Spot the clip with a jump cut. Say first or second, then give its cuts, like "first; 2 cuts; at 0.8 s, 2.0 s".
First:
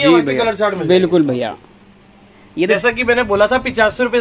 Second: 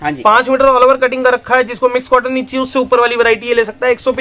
first; 1 cut; at 2.8 s